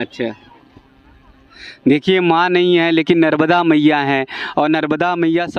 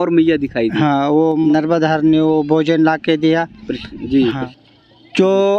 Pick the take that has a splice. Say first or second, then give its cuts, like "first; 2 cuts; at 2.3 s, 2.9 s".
second; 2 cuts; at 1.4 s, 4.5 s